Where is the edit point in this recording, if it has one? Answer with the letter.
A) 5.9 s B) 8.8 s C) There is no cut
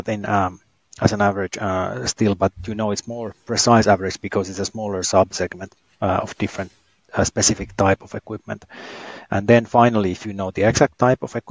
C